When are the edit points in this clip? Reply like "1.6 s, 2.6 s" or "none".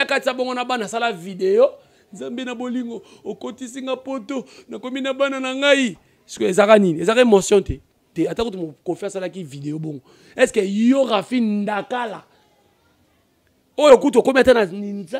8.1 s